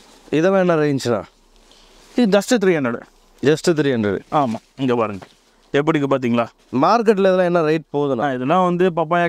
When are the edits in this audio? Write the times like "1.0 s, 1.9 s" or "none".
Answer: none